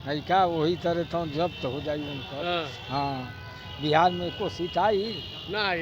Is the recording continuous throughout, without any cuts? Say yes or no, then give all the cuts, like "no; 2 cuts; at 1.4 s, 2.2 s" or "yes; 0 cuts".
yes; 0 cuts